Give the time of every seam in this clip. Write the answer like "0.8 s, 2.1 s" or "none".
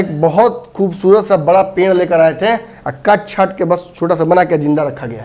none